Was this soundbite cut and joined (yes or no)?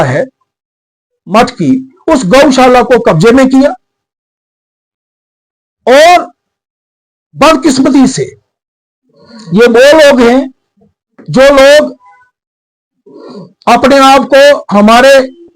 no